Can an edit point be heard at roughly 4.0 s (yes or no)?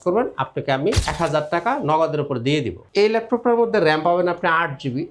no